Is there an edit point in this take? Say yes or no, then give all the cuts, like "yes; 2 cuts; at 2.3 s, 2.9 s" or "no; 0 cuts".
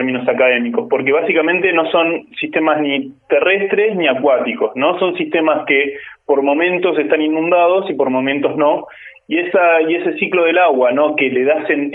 no; 0 cuts